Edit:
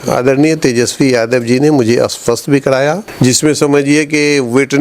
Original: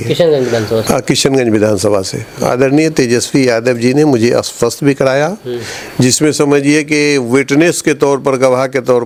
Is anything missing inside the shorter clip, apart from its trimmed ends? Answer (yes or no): yes